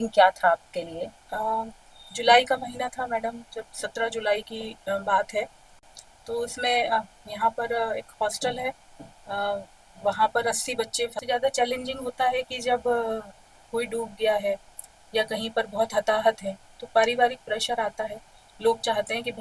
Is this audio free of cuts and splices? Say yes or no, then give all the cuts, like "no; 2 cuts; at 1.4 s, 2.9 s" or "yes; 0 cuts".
no; 2 cuts; at 5.6 s, 11.1 s